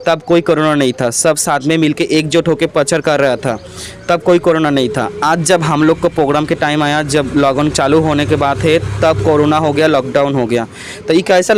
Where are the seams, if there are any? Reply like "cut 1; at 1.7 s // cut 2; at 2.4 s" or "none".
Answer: none